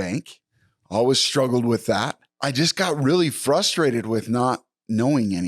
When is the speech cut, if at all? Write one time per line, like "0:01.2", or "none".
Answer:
0:02.2